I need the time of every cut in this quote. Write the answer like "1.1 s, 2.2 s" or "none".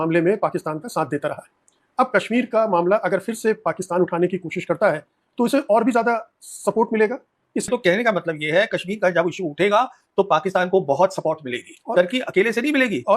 7.7 s